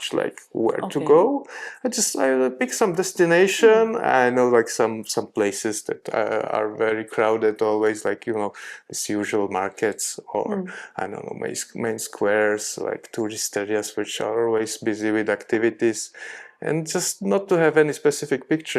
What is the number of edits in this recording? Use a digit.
0